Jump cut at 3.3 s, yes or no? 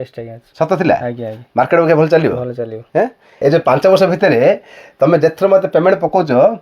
yes